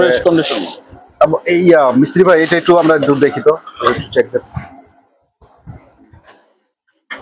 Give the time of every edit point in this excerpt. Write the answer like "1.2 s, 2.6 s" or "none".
none